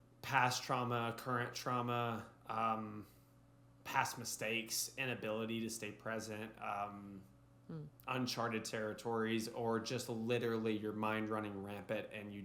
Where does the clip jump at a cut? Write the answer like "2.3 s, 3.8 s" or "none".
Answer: none